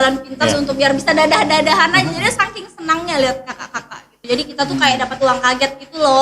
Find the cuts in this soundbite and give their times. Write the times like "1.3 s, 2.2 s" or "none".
4.1 s